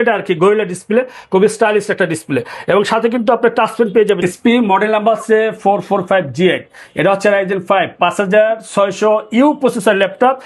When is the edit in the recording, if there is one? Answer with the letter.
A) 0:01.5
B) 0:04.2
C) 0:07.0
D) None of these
B